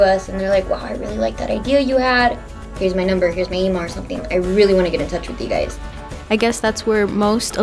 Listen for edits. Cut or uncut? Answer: cut